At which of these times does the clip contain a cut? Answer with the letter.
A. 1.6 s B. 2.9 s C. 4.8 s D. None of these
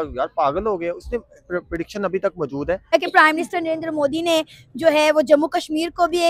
B